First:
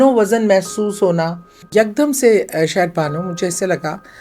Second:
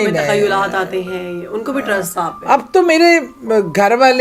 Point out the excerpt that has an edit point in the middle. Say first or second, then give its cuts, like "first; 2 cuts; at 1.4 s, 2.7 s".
first; 1 cut; at 1.6 s